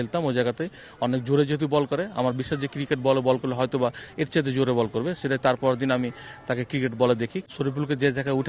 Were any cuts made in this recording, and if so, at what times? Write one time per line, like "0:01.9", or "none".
0:07.4